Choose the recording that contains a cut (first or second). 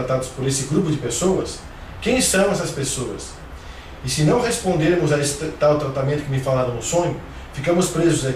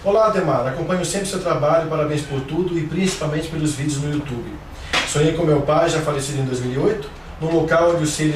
first